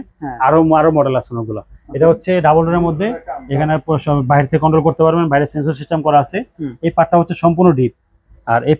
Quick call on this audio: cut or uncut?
uncut